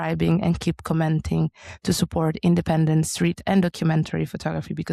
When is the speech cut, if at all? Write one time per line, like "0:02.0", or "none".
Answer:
none